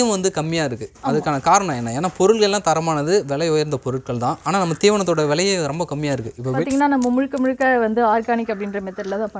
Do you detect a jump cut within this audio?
yes; 1 cut; at 6.6 s

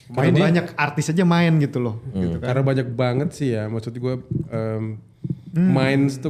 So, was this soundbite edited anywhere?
no; 0 cuts

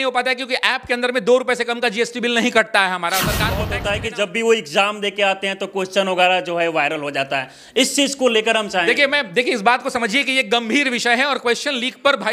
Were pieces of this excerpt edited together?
yes; 1 cut; at 3.7 s

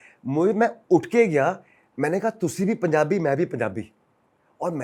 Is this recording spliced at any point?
no; 0 cuts

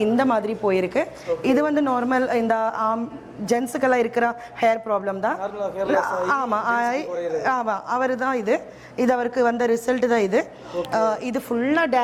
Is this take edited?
no; 0 cuts

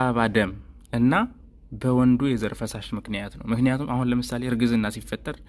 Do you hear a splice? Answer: no; 0 cuts

